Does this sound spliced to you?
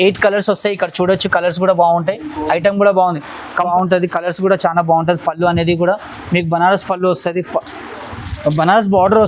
yes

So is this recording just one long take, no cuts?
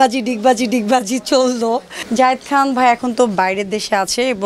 no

